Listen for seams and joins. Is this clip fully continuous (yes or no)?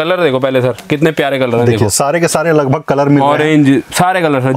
yes